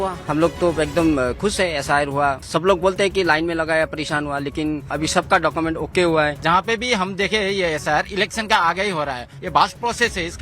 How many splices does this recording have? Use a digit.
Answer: 3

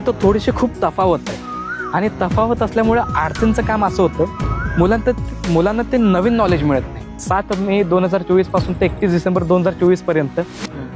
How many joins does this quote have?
1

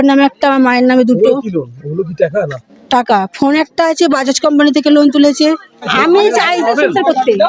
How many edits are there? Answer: 1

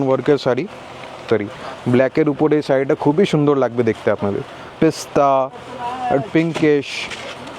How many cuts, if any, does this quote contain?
2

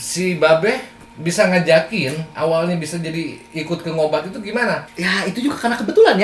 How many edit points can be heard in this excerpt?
1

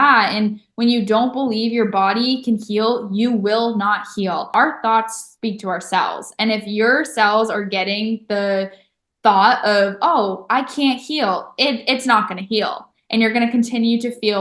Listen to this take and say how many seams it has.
1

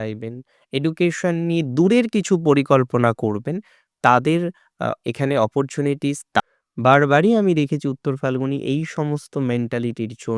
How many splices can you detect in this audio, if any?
1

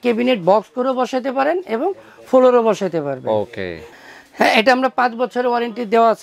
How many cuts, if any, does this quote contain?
1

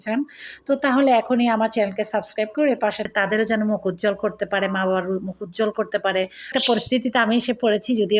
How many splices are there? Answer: 2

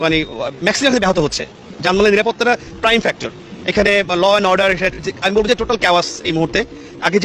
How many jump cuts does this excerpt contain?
0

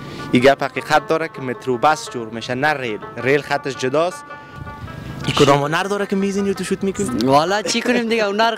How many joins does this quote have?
1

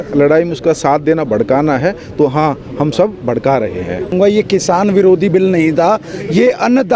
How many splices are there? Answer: 1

